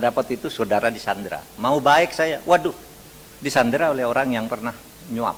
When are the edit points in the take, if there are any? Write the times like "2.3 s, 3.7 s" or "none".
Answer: none